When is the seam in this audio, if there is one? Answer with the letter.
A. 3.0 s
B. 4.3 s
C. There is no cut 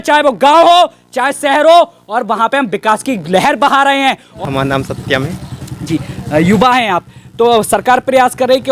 B